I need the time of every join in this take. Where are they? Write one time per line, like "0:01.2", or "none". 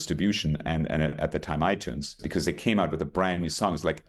0:02.2